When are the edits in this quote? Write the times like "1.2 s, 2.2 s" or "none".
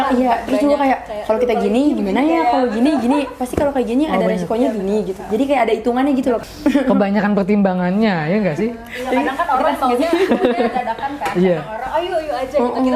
6.4 s

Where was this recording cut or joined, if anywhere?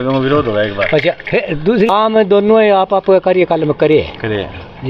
1.9 s

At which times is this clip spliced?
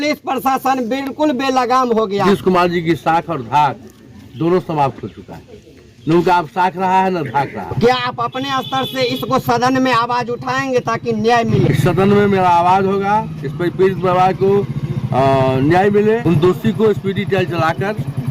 2.2 s, 7.7 s, 11.6 s, 16.2 s

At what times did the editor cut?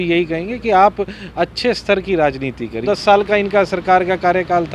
2.8 s

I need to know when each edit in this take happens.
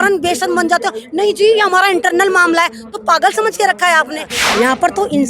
4.3 s

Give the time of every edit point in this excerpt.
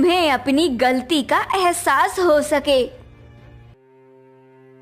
3.7 s

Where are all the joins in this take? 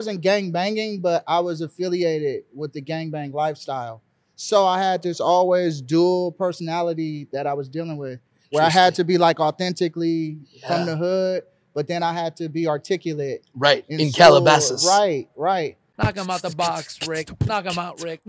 15.8 s

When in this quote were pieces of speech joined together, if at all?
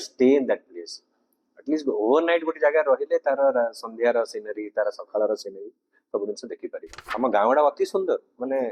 7.0 s

